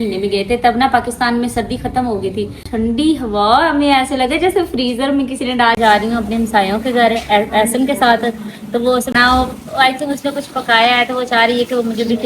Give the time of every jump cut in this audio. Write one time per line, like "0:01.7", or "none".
0:02.7
0:05.8
0:09.1

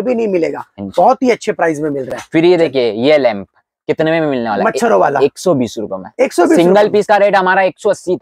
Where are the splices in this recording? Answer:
none

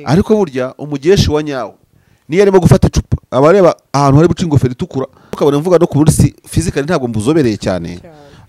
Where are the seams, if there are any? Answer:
0:05.2

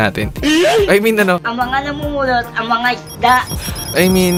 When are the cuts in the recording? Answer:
none

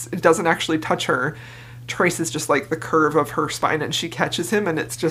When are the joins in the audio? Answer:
none

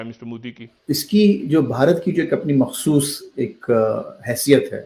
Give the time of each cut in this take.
0:01.0

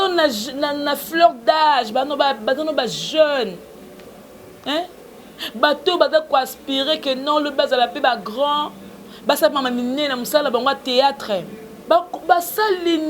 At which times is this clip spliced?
0:11.8

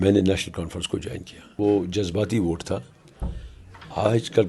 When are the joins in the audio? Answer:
0:01.5

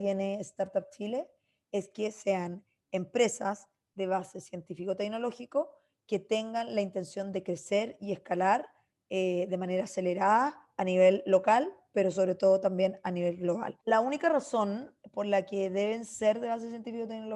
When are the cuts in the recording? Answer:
0:13.8

